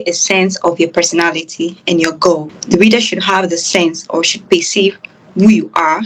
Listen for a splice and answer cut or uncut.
cut